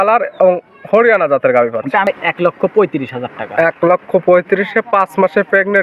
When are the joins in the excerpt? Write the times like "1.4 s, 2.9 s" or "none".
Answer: 2.1 s